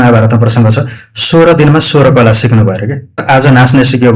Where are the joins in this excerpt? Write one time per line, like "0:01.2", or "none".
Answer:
0:03.2